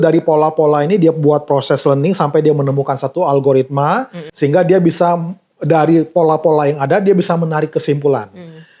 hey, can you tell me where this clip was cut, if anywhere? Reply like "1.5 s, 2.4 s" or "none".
4.3 s